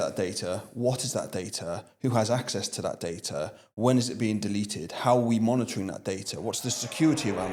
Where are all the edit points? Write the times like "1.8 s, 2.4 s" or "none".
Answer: none